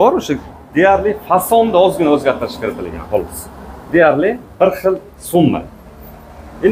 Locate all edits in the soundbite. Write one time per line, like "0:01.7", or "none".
none

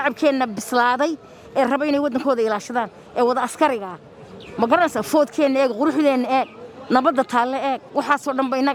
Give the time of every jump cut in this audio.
none

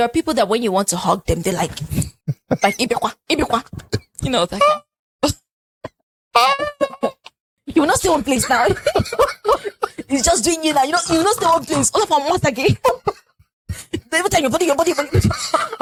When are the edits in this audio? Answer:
none

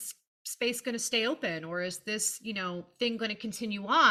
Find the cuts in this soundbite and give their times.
none

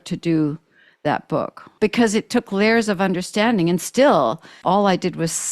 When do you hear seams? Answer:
0:01.6
0:04.5

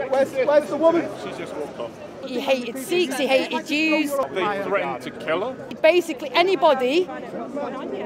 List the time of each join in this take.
0:02.2
0:04.3
0:05.7

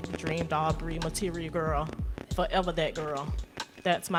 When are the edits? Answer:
none

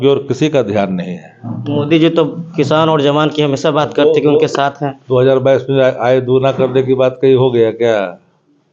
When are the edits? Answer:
none

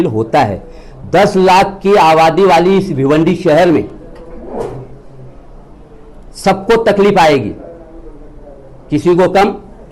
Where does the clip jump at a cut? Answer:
none

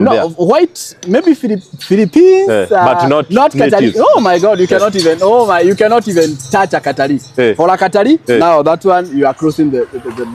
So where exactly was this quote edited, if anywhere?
none

